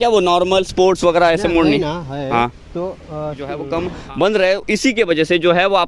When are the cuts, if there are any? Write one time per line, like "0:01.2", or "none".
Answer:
0:03.6